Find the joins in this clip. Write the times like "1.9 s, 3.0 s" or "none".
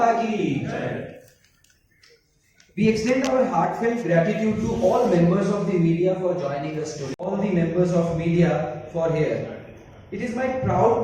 7.2 s